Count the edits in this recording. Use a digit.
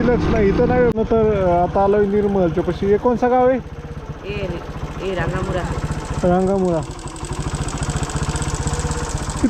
1